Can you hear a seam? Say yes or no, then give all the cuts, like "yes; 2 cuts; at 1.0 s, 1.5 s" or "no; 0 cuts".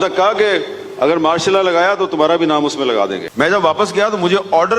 yes; 1 cut; at 3.2 s